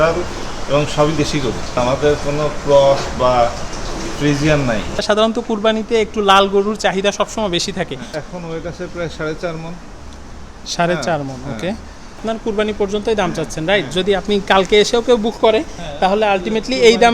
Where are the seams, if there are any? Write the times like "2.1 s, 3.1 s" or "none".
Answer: 1.8 s, 5.0 s, 8.2 s, 12.2 s